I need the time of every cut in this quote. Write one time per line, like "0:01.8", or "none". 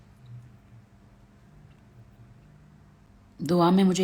0:03.1